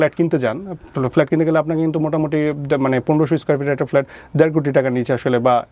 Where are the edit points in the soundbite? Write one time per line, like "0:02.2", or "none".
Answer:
none